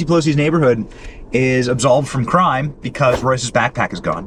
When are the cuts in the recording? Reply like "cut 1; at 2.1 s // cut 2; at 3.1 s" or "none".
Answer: none